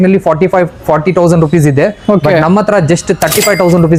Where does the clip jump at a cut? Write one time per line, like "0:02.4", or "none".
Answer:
none